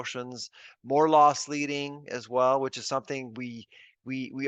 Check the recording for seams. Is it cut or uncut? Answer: uncut